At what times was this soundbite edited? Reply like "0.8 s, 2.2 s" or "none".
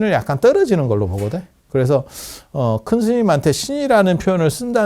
1.6 s